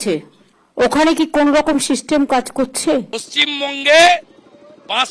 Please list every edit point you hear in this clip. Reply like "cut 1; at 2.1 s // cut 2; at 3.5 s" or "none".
cut 1; at 3.2 s